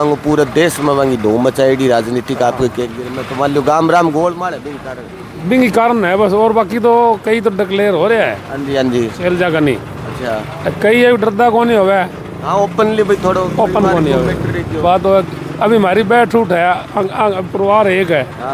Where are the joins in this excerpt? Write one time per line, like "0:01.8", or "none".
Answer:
none